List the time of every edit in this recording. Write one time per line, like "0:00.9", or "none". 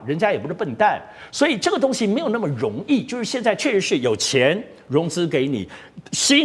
none